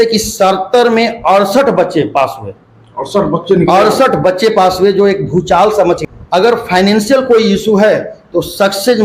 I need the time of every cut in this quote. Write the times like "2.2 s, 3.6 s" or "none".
6.0 s